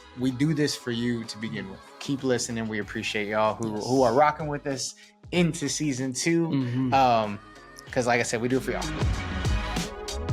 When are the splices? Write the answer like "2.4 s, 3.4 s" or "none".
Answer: 8.9 s